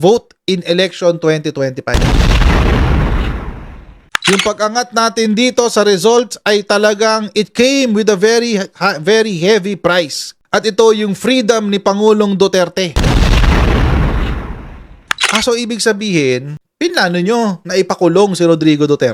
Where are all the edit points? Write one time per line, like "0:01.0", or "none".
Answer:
0:04.0